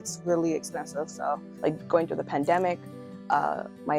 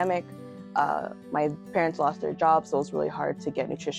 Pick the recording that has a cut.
first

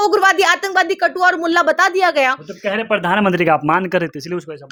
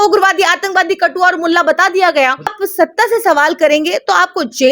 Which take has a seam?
second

